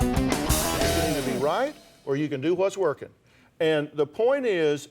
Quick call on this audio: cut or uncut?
cut